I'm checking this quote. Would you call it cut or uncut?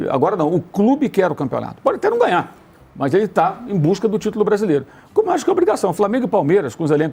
uncut